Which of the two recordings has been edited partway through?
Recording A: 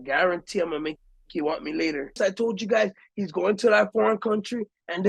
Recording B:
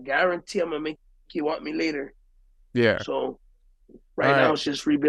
A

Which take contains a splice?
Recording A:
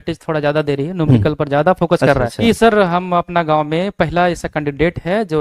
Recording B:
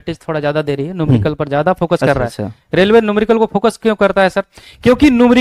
A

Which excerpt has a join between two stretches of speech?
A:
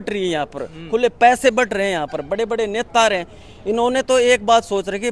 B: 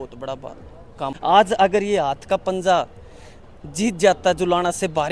B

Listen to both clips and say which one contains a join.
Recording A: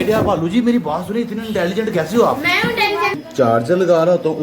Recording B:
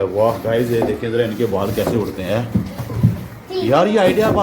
A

